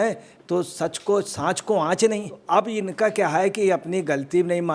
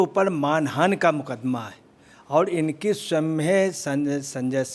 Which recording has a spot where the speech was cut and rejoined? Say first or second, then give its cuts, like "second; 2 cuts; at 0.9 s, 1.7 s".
first; 1 cut; at 2.4 s